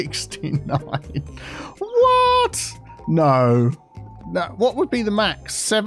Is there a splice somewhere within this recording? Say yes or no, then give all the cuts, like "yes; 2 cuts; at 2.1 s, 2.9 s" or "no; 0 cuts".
no; 0 cuts